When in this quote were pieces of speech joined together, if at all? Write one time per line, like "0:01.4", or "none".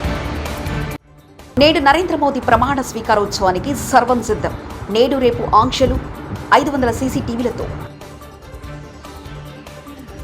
0:00.9